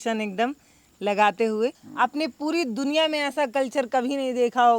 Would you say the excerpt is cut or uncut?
cut